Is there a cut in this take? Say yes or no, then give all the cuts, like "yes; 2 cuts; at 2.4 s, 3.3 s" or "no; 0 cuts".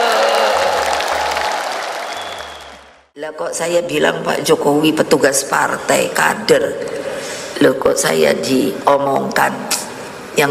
yes; 1 cut; at 3.3 s